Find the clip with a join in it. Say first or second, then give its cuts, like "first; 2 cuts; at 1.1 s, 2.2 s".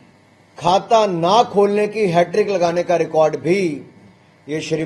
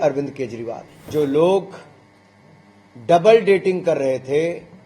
second; 1 cut; at 1.1 s